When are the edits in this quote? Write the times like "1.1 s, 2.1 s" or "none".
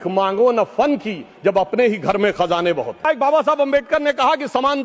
3.1 s